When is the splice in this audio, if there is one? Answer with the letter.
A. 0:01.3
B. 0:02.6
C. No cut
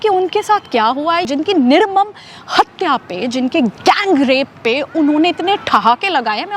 A